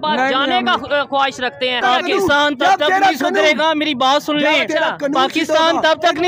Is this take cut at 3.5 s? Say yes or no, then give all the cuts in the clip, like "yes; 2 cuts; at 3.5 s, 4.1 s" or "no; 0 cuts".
no; 1 cut; at 1.8 s